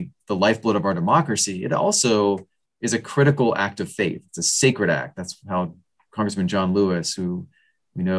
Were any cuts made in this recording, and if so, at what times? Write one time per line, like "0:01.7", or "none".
none